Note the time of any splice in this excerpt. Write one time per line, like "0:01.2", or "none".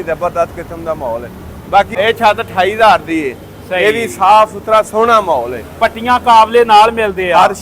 0:01.9

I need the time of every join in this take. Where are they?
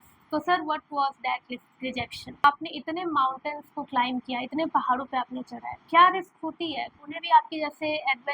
0:02.4
0:07.0

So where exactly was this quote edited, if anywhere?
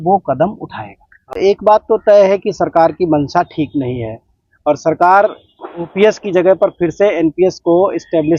0:01.3

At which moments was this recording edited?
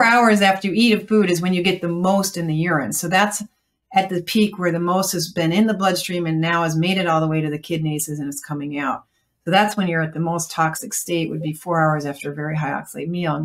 none

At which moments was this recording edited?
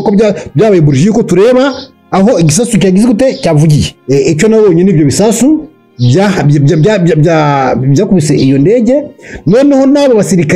0:03.9

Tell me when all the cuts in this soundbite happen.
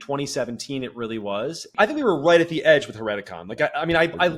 0:01.7

